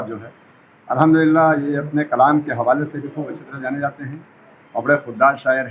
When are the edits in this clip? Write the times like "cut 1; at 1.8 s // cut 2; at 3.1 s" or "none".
none